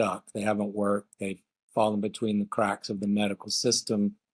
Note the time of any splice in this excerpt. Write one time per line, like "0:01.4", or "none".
none